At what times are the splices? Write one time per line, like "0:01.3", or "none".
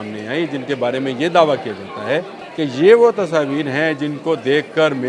0:02.4